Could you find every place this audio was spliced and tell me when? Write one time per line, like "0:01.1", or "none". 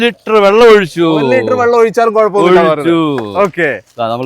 none